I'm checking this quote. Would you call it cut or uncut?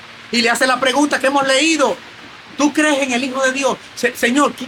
uncut